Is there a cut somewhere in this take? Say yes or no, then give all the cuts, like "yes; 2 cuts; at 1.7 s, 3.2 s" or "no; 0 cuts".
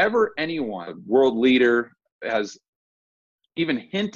yes; 1 cut; at 0.9 s